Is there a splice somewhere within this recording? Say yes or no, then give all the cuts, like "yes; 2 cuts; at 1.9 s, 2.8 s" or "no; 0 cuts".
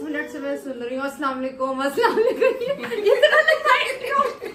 no; 0 cuts